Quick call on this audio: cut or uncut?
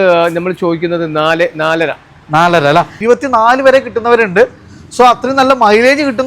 cut